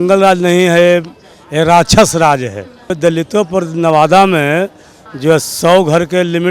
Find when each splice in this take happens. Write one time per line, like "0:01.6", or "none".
0:02.9

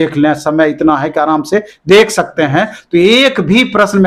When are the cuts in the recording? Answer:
none

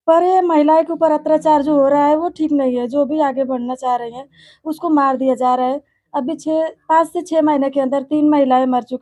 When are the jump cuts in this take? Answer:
none

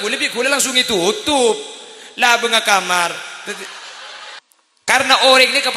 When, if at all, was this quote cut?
0:04.4

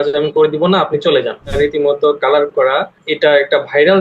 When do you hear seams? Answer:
0:01.5
0:03.0

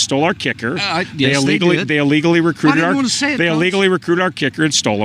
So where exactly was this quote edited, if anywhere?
none

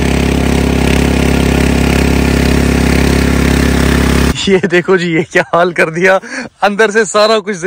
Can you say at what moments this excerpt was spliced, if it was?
none

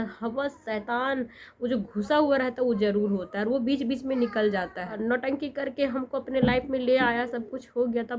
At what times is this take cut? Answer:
0:04.9

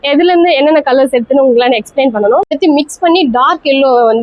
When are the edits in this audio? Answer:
0:02.6

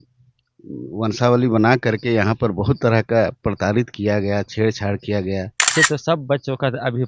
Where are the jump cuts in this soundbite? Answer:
0:05.7

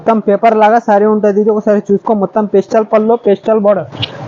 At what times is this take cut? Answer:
none

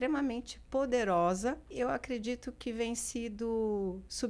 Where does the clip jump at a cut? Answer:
0:01.7

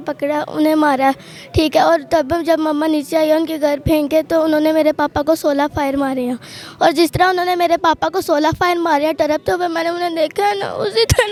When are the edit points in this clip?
none

